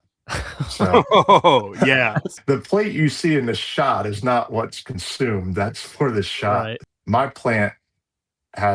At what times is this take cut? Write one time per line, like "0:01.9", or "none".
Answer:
0:02.3
0:06.9